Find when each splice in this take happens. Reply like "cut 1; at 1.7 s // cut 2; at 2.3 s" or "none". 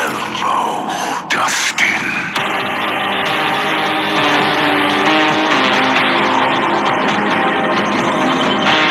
none